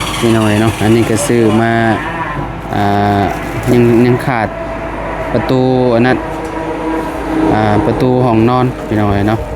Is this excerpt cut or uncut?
uncut